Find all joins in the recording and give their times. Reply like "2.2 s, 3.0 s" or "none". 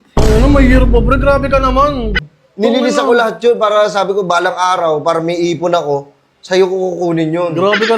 2.2 s